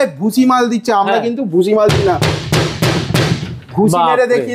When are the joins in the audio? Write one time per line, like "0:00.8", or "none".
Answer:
none